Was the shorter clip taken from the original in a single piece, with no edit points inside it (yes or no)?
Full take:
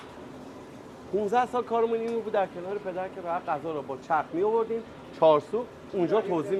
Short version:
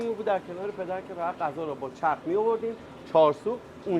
yes